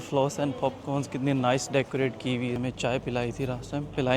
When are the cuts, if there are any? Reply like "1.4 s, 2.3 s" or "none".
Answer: 2.6 s